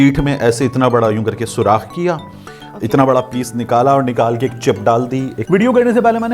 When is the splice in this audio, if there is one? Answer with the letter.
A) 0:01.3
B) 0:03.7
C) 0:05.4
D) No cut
C